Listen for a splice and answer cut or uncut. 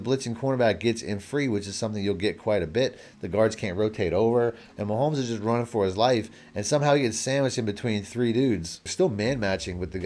cut